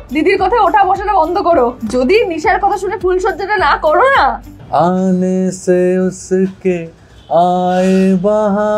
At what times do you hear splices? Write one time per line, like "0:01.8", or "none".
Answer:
0:01.8
0:04.5